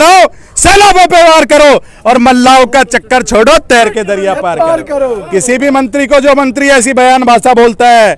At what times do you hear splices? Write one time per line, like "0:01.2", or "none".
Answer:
none